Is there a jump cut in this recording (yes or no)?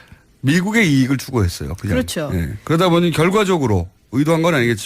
yes